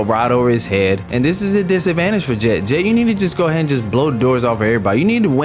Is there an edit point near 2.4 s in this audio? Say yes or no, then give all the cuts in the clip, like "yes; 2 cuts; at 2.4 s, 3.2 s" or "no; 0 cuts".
no; 1 cut; at 1.1 s